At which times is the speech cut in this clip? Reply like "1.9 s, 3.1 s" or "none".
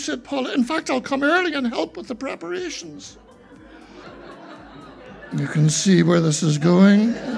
4.0 s